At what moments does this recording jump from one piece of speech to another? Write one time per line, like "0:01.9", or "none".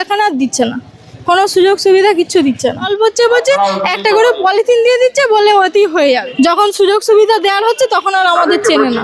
0:02.9
0:06.3

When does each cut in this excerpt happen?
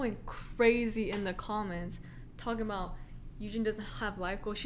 none

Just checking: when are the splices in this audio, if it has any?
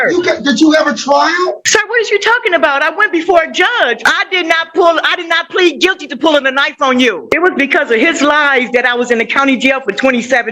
0:01.6
0:04.0
0:07.2

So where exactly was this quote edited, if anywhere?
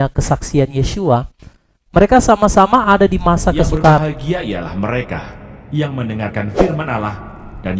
0:04.0

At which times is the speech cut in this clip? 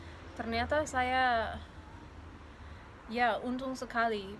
none

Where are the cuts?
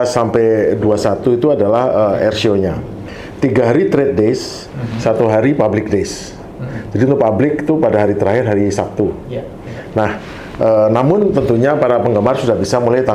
none

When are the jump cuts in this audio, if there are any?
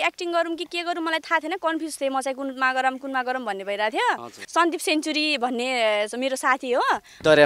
0:04.4

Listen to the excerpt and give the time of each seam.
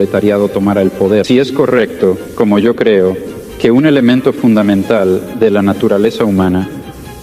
0:01.3

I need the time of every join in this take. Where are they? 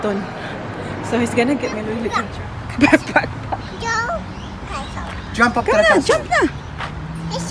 0:02.2

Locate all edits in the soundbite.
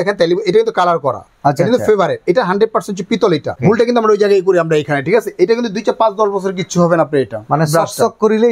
0:03.6

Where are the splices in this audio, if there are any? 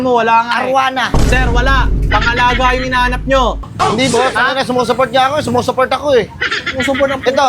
0:03.7

